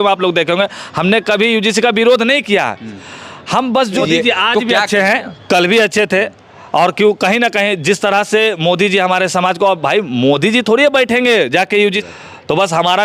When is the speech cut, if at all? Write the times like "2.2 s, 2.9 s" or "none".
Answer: 3.9 s, 11.8 s